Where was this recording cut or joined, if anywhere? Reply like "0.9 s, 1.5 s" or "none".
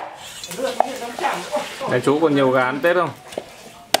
1.8 s